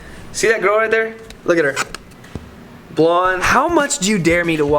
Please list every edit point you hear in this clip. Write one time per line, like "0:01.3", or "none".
0:03.5

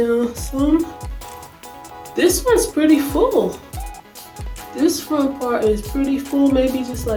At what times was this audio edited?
none

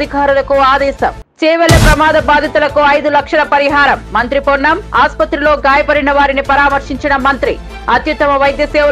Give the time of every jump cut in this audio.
0:01.2

